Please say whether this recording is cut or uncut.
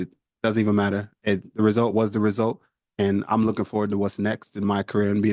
uncut